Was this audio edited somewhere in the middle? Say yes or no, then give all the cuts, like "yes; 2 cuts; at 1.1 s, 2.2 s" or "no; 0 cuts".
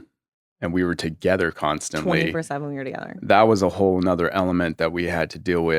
no; 0 cuts